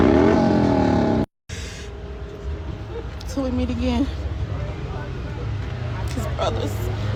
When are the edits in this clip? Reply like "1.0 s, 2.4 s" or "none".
none